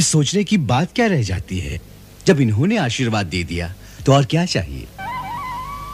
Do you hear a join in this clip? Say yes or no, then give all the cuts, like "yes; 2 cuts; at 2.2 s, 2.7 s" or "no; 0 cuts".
yes; 1 cut; at 3.1 s